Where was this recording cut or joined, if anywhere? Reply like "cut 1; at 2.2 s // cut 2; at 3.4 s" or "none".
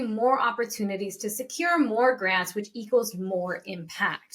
none